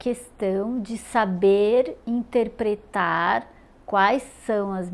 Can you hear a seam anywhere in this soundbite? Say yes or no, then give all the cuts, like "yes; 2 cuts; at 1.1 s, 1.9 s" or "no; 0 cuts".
no; 0 cuts